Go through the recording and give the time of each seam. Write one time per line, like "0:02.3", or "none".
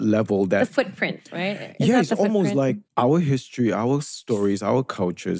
none